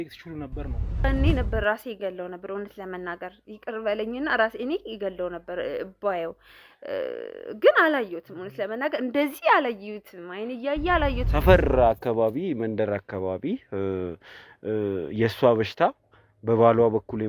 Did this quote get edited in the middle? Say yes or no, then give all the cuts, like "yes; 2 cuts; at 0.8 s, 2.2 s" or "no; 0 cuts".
yes; 2 cuts; at 1.0 s, 11.2 s